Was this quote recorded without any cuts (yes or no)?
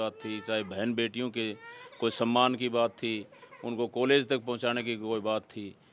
yes